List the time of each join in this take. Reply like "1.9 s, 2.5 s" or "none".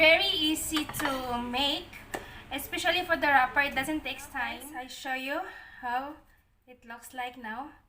4.6 s